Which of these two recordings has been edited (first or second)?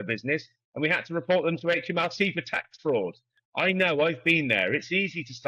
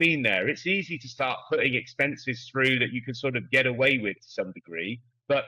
first